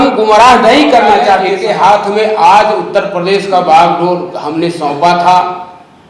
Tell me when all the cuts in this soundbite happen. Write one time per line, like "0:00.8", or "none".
0:01.5